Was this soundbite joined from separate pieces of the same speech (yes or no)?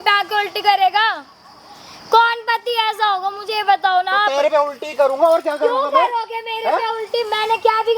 no